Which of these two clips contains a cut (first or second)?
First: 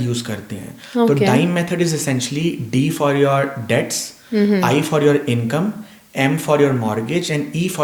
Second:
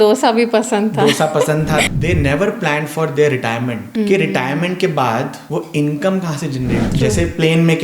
second